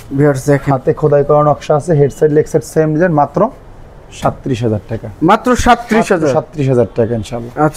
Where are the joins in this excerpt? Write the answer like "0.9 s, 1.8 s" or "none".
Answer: none